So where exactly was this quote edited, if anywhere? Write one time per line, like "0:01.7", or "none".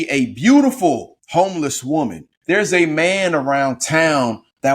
0:01.1
0:02.3